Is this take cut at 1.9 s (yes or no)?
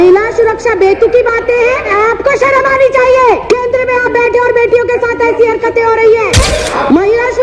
yes